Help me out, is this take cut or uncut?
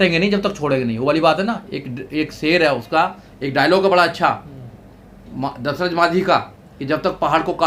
uncut